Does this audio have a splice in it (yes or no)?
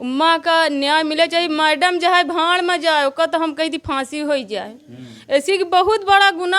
no